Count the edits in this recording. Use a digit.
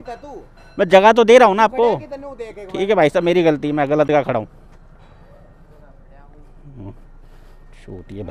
0